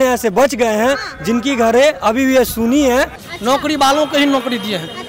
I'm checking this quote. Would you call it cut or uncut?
cut